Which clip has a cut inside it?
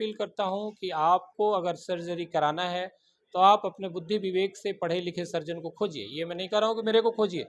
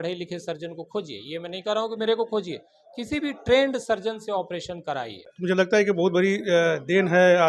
second; 1 cut; at 5.3 s

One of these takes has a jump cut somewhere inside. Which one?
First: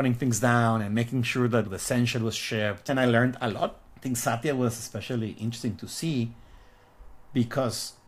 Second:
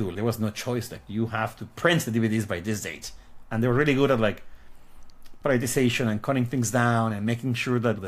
first; 2 cuts; at 2.9 s, 3.9 s

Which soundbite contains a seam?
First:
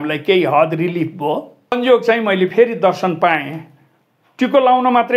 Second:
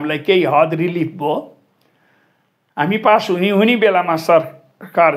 first; 1 cut; at 1.7 s

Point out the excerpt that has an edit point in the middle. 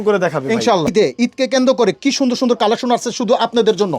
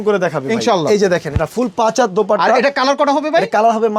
first; 1 cut; at 0.9 s

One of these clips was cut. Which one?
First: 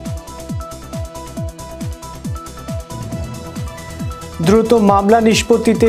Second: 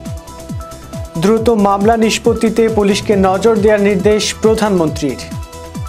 second; 2 cuts; at 1.1 s, 5.2 s

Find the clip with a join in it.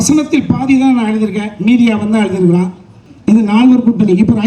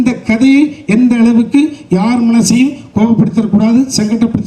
first; 1 cut; at 3.1 s

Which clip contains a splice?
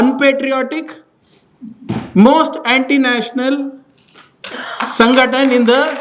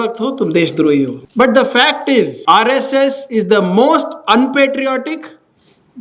second; 2 cuts; at 1.2 s, 2.4 s

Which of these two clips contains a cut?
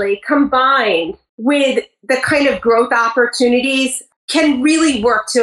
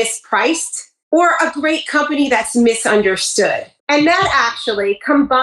first; 1 cut; at 4.0 s

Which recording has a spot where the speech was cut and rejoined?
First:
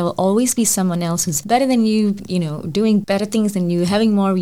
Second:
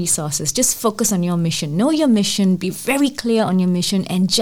first; 3 cuts; at 1.3 s, 2.2 s, 3.1 s

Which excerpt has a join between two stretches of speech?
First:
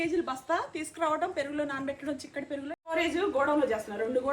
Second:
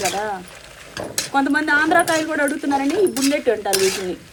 first; 1 cut; at 2.9 s

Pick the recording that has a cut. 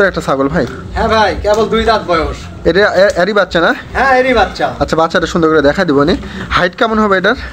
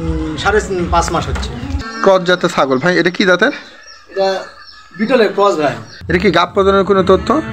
second; 2 cuts; at 1.6 s, 5.9 s

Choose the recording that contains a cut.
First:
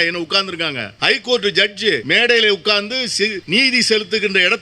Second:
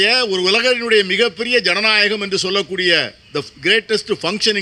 first; 3 cuts; at 0.9 s, 2.0 s, 3.4 s

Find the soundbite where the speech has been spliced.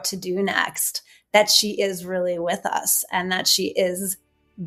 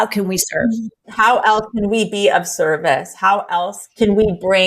second; 2 cuts; at 1.0 s, 3.8 s

